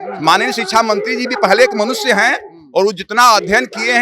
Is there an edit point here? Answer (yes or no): no